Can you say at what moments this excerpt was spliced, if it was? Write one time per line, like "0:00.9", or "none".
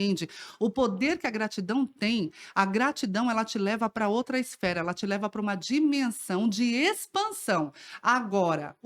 none

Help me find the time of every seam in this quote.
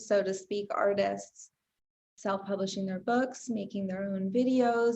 0:02.0

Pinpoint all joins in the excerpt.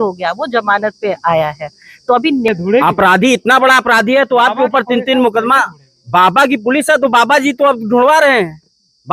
0:02.5

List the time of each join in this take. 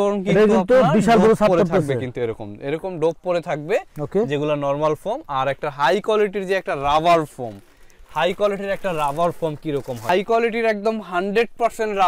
none

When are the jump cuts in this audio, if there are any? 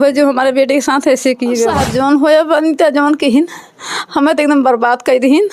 0:01.7

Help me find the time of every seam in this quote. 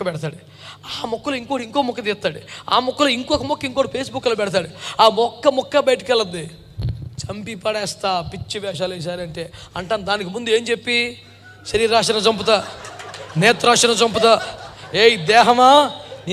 none

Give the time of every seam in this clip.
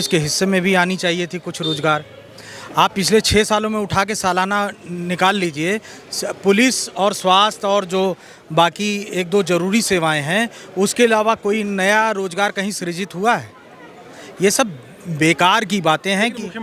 none

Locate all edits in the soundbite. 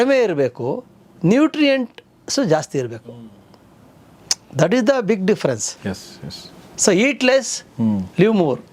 none

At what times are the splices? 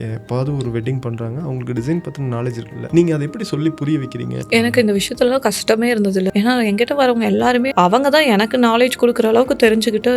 0:02.7
0:04.3
0:06.3
0:07.7

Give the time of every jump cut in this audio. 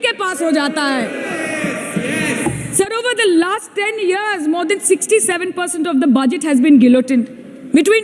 none

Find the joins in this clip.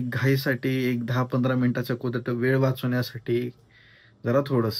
none

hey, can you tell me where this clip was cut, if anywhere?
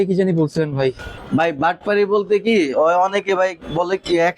0:01.1

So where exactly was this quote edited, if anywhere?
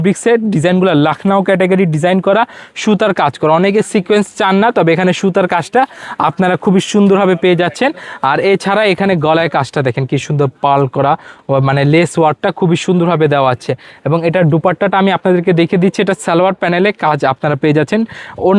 none

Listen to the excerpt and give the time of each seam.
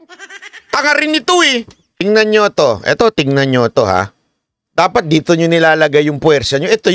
0:01.8

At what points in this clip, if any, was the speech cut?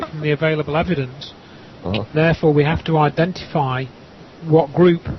0:03.3

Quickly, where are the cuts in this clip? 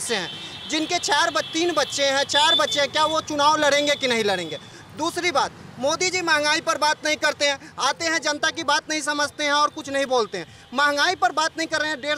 none

